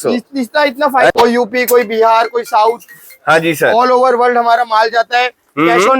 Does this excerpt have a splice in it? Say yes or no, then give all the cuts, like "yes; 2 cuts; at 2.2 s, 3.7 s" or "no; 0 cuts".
yes; 1 cut; at 1.1 s